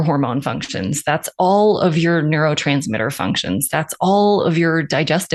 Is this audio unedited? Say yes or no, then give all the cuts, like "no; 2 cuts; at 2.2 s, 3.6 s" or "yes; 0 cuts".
yes; 0 cuts